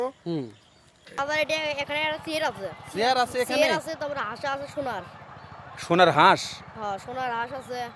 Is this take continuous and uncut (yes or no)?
no